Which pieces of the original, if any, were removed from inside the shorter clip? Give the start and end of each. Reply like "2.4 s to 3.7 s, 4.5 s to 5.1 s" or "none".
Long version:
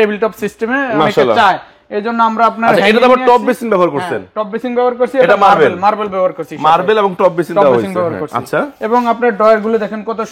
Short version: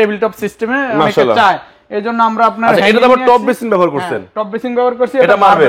none

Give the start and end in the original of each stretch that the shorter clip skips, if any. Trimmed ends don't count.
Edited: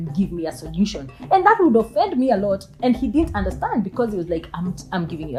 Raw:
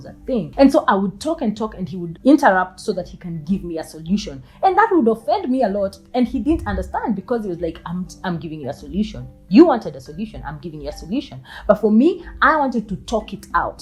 none

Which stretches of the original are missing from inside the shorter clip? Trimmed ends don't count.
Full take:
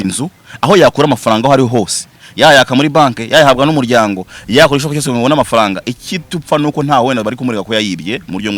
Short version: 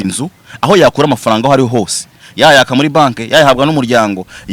none

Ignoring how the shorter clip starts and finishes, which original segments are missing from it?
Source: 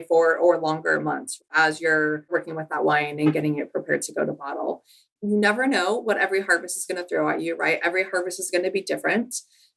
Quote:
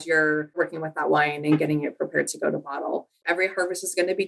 5.0 s to 7.8 s

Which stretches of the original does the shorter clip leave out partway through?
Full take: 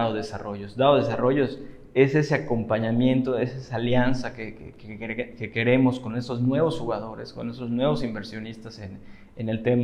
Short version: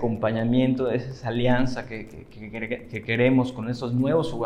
none

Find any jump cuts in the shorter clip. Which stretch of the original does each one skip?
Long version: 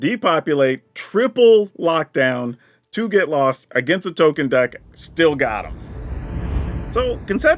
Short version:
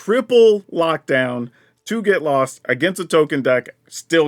none

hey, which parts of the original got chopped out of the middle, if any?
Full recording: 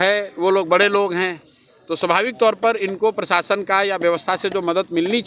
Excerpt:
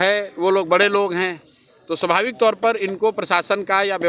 none

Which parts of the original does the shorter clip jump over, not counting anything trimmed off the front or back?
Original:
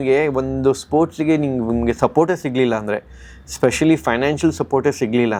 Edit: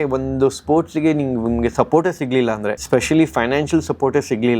3.0 s to 3.5 s

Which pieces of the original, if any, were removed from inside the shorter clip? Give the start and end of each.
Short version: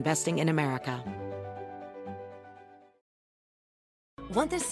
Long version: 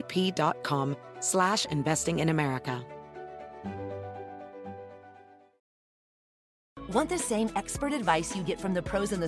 2.8 s to 3.6 s

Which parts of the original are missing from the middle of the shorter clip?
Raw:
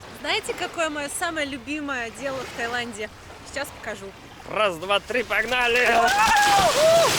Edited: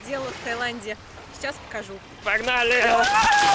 4.4 s to 5.3 s

